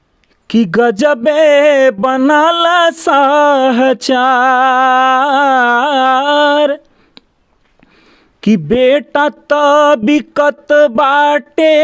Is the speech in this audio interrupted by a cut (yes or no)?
no